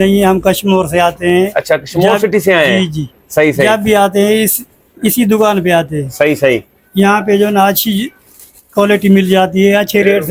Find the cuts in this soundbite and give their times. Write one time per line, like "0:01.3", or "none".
none